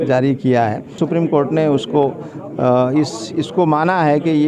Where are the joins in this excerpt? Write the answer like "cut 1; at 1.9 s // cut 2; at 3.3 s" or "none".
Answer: cut 1; at 1.0 s